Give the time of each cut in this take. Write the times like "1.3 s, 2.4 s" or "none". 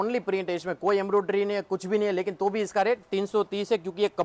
none